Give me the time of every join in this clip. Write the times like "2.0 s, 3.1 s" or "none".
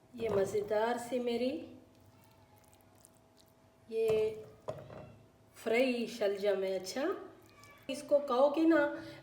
8.0 s